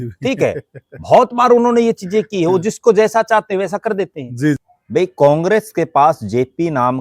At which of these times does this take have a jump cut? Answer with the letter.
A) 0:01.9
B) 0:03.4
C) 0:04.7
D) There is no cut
C